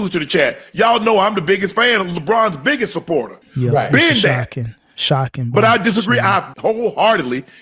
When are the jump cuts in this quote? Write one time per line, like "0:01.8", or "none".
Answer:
0:03.4
0:06.5